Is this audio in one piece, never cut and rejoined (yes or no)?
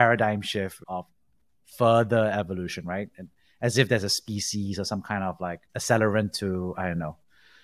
yes